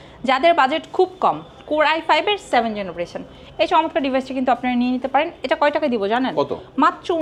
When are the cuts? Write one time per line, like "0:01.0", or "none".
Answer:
none